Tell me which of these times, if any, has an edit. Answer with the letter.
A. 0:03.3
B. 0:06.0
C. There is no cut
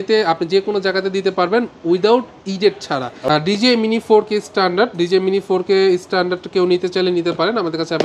A